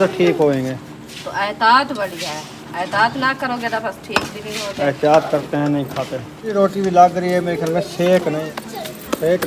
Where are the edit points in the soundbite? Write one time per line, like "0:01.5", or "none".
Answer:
0:06.5
0:08.4